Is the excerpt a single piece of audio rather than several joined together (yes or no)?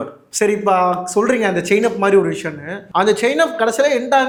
yes